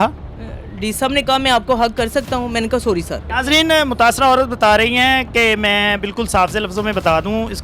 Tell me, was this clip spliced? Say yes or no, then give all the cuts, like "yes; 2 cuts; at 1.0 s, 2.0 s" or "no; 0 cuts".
yes; 1 cut; at 3.3 s